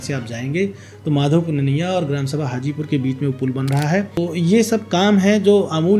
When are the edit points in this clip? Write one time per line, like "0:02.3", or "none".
0:04.2